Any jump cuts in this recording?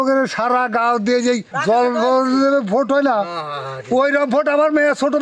no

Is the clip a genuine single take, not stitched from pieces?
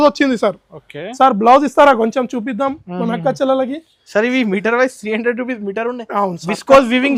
yes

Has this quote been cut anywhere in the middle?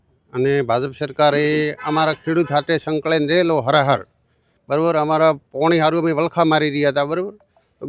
no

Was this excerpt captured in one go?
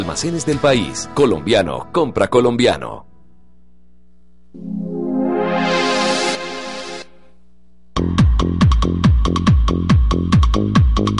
no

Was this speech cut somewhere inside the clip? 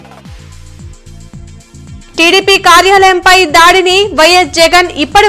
yes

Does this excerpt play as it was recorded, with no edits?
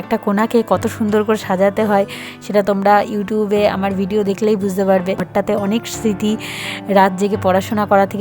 no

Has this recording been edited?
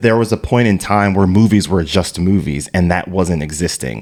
no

